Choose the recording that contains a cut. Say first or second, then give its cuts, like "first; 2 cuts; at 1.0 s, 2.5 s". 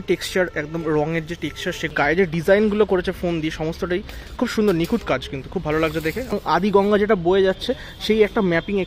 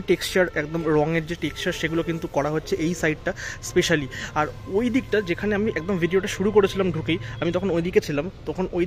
first; 2 cuts; at 2.2 s, 6.6 s